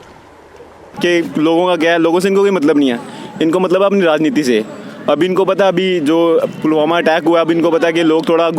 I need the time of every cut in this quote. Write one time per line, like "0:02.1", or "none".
0:00.9